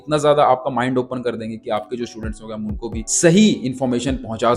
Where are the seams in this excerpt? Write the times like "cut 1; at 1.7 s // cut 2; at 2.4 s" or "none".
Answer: cut 1; at 3.1 s